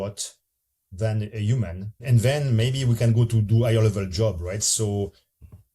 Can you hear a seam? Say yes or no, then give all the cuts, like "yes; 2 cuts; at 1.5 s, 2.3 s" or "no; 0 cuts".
yes; 1 cut; at 2.0 s